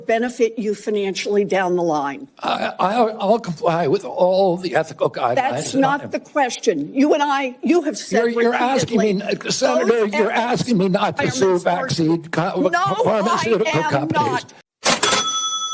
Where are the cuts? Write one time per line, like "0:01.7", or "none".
0:14.6

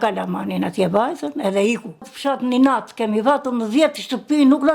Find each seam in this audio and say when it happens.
0:02.0

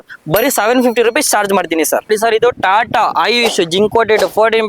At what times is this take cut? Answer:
0:02.1

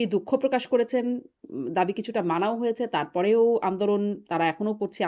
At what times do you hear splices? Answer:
none

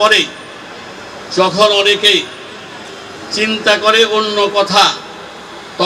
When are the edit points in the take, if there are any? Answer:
none

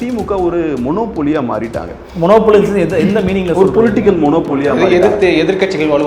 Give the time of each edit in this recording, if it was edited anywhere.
none

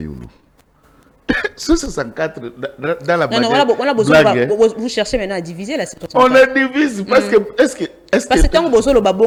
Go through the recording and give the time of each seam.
none

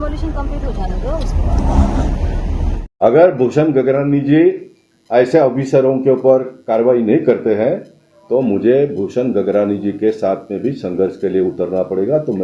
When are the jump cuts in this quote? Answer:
0:02.8

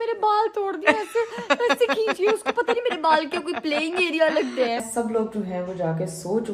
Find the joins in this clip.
0:04.8

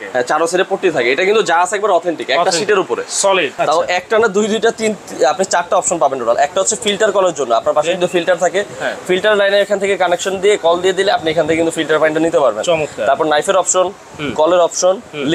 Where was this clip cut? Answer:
0:03.5

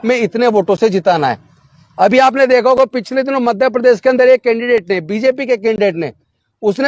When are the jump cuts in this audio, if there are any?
none

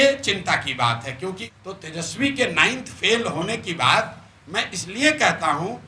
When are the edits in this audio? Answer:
0:01.5

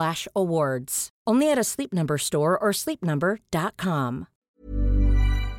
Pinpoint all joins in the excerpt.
0:04.3

